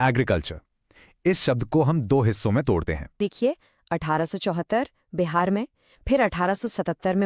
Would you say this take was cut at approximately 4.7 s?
no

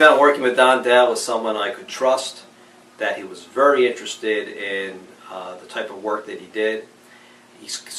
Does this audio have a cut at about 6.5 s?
no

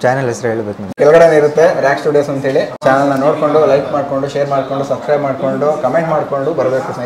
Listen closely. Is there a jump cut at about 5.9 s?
no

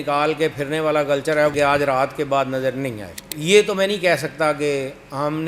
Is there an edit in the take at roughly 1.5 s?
yes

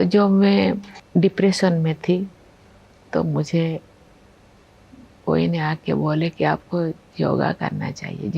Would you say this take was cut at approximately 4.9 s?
no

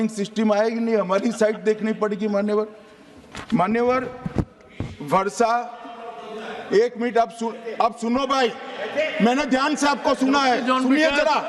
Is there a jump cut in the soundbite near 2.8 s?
no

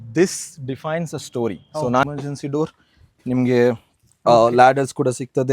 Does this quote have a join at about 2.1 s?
yes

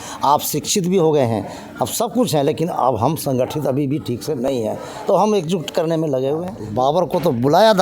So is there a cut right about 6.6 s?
yes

